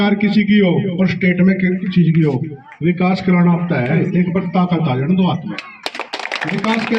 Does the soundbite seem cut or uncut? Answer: cut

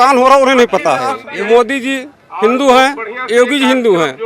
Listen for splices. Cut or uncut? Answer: cut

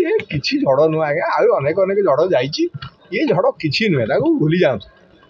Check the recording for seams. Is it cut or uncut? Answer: uncut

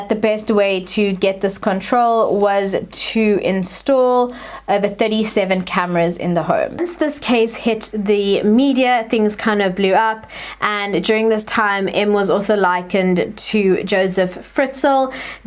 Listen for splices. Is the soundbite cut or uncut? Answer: cut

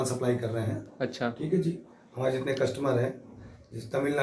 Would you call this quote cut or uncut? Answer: uncut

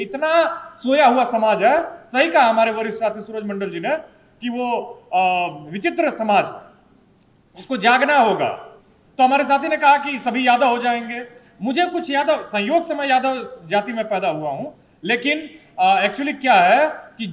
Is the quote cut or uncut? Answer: uncut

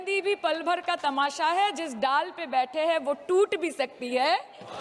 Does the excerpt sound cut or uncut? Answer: uncut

